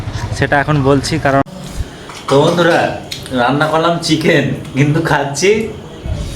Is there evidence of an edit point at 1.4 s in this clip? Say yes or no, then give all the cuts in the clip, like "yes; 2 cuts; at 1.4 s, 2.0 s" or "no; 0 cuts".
yes; 1 cut; at 1.4 s